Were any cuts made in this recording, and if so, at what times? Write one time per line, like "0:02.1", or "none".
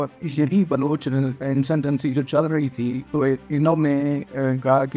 none

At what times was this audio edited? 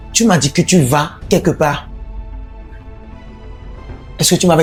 none

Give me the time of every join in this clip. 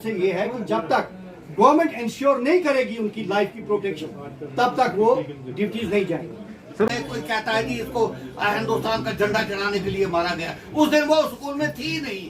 0:06.9

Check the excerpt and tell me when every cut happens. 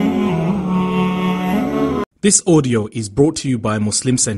0:02.0

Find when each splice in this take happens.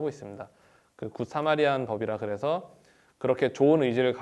none

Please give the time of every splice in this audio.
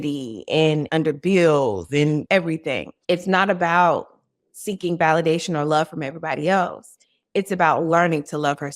0:00.9
0:02.6

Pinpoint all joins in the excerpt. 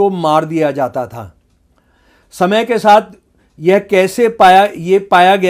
none

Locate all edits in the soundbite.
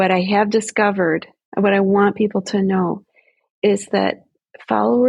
0:01.3

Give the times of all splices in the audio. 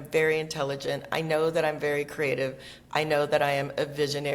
none

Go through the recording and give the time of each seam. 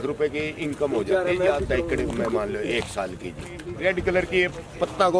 0:03.6

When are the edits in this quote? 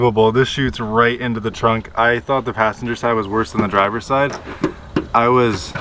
none

